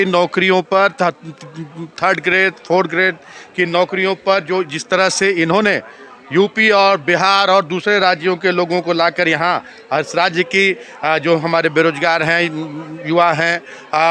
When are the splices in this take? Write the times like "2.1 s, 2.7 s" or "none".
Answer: none